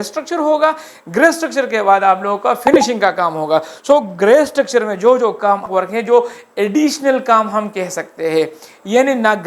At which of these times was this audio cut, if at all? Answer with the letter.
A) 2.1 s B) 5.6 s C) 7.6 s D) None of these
B